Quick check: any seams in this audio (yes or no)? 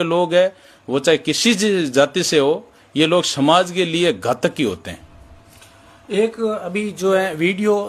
no